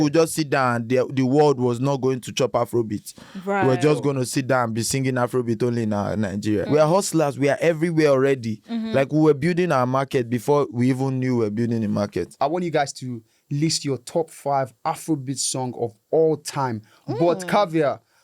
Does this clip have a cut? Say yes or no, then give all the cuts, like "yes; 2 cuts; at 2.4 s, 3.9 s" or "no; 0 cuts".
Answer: yes; 2 cuts; at 6.7 s, 12.3 s